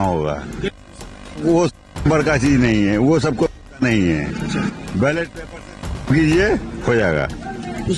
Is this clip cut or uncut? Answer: cut